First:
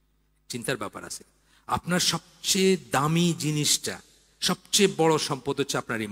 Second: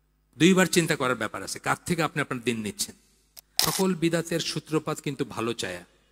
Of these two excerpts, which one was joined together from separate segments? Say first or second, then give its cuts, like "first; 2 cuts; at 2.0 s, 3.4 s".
second; 1 cut; at 3.5 s